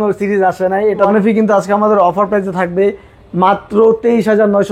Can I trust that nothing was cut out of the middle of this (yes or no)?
no